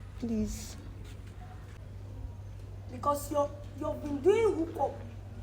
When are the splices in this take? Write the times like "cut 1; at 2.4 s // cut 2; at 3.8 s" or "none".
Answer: cut 1; at 1.8 s